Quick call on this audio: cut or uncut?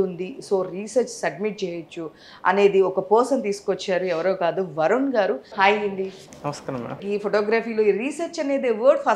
cut